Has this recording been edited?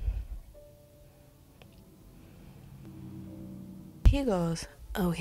yes; 2 cuts; at 1.6 s, 4.0 s

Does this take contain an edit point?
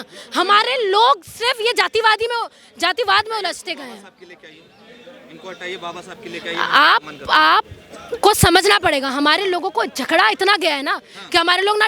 no; 0 cuts

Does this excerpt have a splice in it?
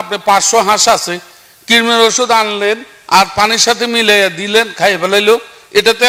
no; 0 cuts

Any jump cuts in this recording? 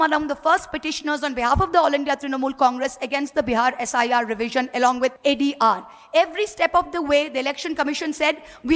yes; 1 cut; at 5.2 s

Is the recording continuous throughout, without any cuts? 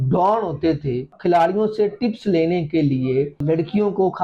no; 2 cuts; at 1.1 s, 3.4 s

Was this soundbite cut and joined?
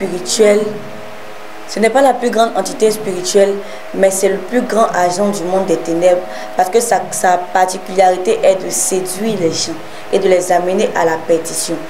no; 0 cuts

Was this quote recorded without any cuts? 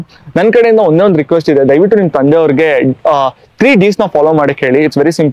yes; 0 cuts

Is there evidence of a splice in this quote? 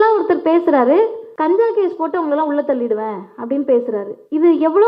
yes; 1 cut; at 1.2 s

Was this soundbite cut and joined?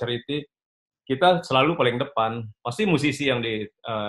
no; 0 cuts

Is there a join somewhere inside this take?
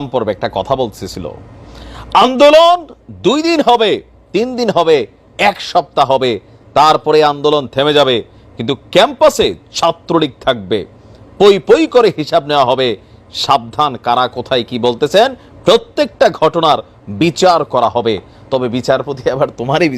no; 0 cuts

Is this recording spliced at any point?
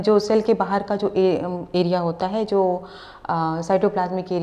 no; 0 cuts

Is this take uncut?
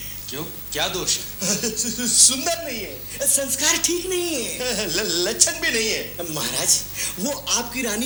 yes; 0 cuts

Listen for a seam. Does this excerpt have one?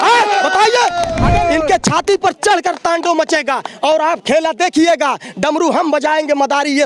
yes; 1 cut; at 1.2 s

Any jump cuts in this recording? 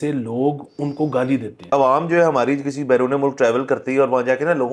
yes; 1 cut; at 1.7 s

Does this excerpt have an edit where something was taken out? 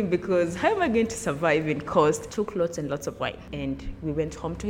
yes; 2 cuts; at 2.2 s, 3.4 s

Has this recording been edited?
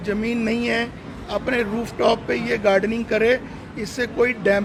no; 0 cuts

